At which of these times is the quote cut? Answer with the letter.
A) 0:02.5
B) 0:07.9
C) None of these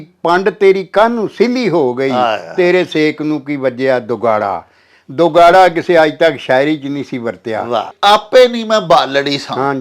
B